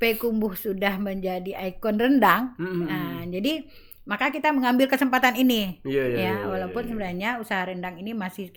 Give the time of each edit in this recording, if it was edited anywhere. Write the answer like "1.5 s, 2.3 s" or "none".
none